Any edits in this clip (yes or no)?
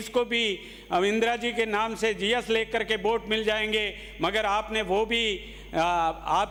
no